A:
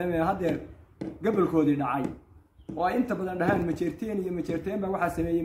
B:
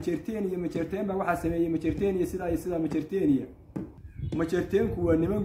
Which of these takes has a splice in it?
B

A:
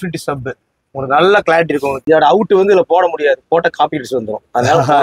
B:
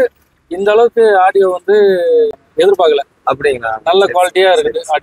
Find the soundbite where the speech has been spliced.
A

